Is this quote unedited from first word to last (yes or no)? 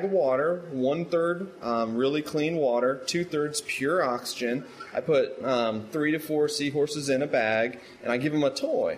yes